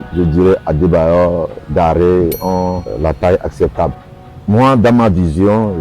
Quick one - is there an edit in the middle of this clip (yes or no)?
yes